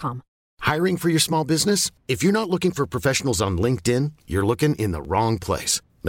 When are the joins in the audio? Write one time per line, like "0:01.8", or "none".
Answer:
none